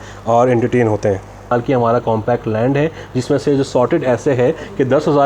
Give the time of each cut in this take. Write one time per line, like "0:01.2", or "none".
0:01.5

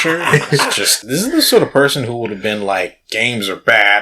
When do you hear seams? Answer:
0:01.0

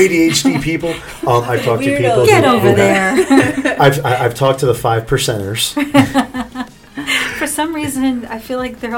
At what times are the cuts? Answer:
none

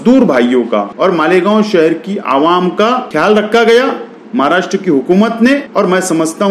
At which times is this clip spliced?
0:00.9
0:03.1
0:05.7

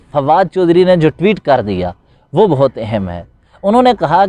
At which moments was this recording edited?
none

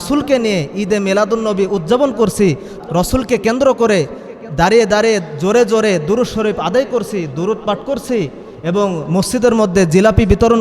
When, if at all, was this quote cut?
0:02.7

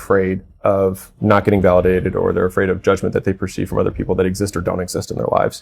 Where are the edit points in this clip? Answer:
0:01.1

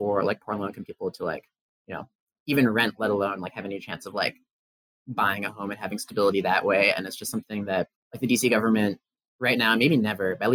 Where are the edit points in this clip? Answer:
0:08.0

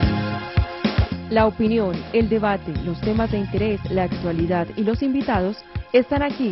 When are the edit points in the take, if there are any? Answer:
0:01.0

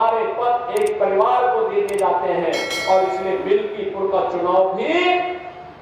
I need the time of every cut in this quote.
none

